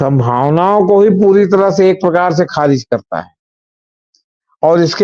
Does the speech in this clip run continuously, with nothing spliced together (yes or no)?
yes